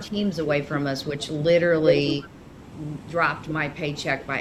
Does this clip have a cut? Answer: no; 0 cuts

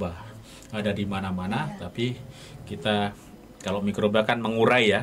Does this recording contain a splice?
no; 0 cuts

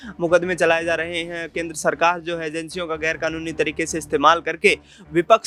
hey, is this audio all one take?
yes; 0 cuts

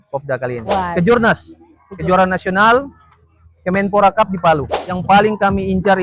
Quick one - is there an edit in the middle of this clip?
yes; 2 cuts; at 0.9 s, 4.9 s

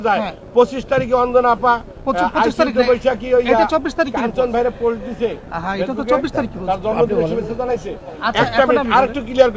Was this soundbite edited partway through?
no; 0 cuts

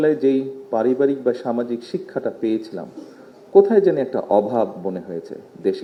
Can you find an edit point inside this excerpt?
no; 0 cuts

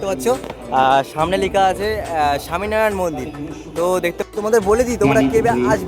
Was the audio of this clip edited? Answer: yes; 1 cut; at 4.2 s

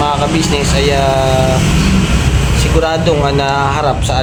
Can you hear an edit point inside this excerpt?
no; 0 cuts

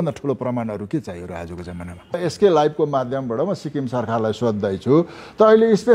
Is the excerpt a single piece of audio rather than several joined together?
no; 1 cut; at 2.2 s

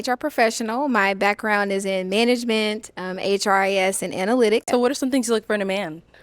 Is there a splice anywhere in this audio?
yes; 1 cut; at 4.6 s

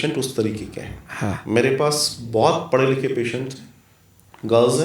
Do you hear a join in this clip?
no; 0 cuts

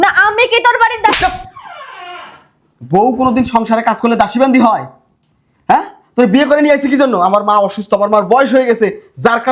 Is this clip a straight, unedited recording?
yes; 0 cuts

